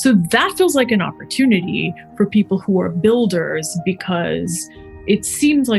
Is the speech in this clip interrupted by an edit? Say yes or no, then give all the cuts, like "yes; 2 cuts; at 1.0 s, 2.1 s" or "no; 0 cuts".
no; 0 cuts